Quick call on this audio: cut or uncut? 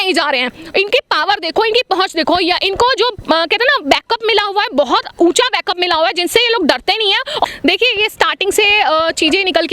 cut